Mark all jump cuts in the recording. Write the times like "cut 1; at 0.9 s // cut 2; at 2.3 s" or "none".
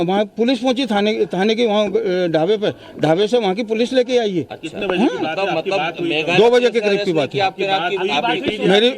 cut 1; at 4.1 s